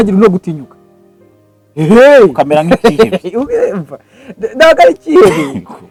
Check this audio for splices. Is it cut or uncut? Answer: uncut